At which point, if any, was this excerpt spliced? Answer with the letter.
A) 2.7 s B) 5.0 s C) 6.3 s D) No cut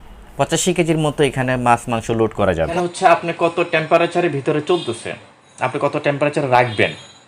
A